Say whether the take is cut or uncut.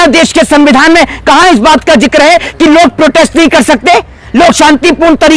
uncut